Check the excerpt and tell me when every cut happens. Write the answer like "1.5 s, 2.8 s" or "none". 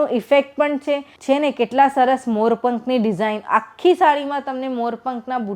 1.1 s